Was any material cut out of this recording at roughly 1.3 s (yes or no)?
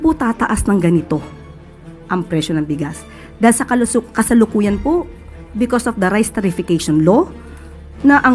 no